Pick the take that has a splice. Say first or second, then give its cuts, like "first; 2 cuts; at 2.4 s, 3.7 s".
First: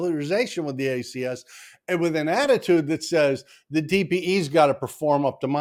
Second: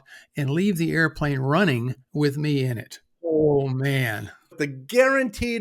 second; 2 cuts; at 3.2 s, 4.5 s